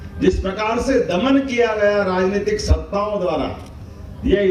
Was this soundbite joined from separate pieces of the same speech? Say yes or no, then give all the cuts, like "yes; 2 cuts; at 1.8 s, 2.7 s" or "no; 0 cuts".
no; 0 cuts